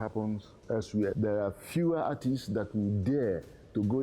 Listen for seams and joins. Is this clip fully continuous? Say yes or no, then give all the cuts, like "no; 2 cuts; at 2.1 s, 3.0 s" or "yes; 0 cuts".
no; 1 cut; at 1.1 s